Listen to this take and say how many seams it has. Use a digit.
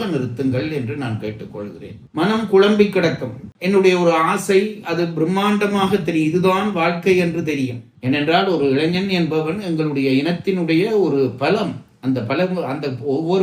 2